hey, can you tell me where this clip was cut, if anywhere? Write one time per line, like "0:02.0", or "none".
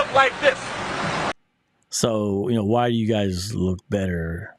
none